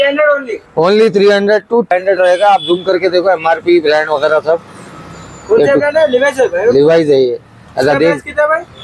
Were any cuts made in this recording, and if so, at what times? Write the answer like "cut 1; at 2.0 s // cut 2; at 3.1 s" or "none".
cut 1; at 1.9 s